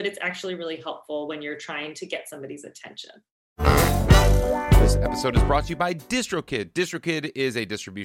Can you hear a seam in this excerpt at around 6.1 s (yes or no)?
no